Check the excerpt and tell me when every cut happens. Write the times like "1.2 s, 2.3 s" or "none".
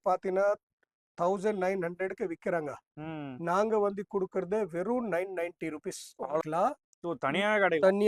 6.4 s